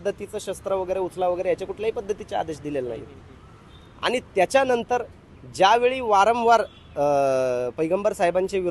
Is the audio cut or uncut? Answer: uncut